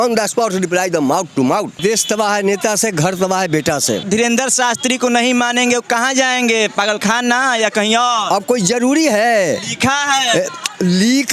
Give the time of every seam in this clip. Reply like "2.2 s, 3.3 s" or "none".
1.8 s, 4.0 s